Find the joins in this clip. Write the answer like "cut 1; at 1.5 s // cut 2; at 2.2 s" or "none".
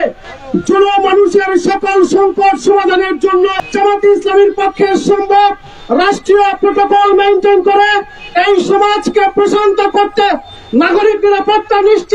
cut 1; at 3.6 s